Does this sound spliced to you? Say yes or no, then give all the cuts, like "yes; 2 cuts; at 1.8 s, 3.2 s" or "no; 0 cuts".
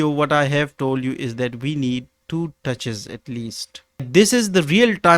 yes; 1 cut; at 4.1 s